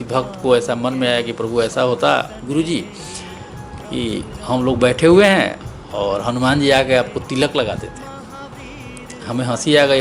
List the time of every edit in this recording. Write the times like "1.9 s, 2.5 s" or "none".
none